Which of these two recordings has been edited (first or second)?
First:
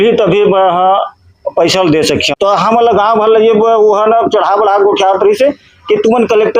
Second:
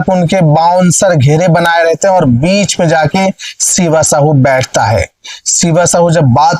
first